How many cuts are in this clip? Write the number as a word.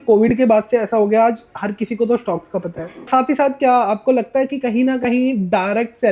one